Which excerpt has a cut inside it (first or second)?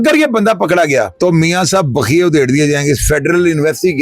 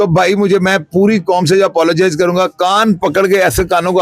first